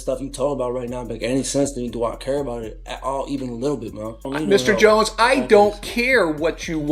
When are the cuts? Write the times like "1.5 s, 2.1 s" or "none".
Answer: 4.3 s

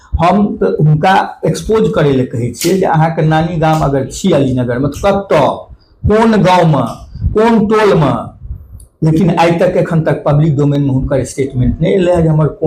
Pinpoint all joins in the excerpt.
none

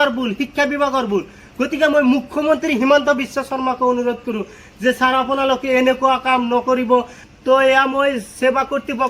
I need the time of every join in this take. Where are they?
7.2 s

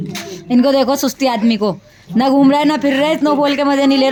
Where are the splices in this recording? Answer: none

